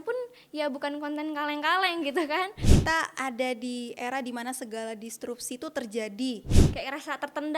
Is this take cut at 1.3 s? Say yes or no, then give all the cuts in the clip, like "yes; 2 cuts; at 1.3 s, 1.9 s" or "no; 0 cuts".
no; 2 cuts; at 2.7 s, 6.6 s